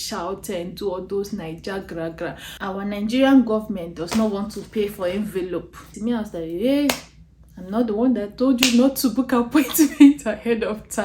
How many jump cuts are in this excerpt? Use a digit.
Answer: 2